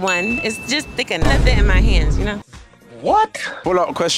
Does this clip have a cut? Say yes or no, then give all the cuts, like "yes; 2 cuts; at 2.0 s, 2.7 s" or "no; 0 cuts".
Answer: no; 0 cuts